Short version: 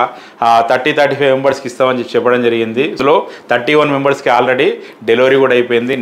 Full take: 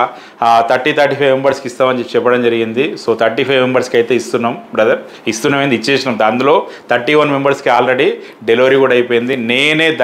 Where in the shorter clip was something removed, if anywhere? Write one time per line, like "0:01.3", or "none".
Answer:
0:03.0